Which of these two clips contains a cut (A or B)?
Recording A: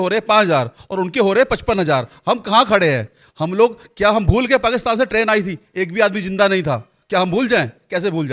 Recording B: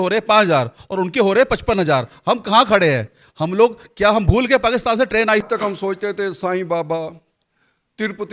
B